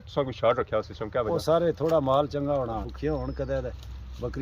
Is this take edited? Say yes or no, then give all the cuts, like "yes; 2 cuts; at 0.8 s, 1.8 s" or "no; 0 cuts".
yes; 1 cut; at 2.9 s